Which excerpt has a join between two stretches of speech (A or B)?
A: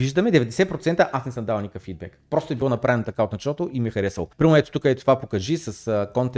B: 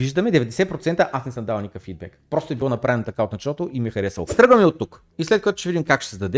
B